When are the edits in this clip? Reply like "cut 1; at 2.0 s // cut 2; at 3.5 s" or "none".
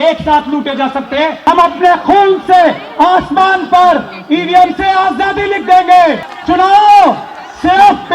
cut 1; at 1.4 s // cut 2; at 6.3 s